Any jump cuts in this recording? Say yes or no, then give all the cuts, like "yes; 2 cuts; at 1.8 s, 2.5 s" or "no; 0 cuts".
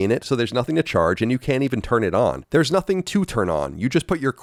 no; 0 cuts